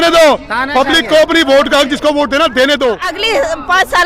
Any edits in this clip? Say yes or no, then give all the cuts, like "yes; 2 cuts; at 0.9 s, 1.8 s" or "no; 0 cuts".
yes; 1 cut; at 3.1 s